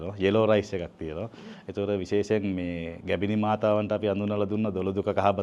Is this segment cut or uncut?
uncut